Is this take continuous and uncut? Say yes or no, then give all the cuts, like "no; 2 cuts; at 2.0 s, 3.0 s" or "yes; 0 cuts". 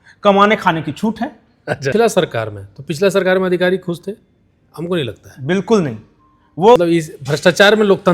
no; 2 cuts; at 1.9 s, 6.8 s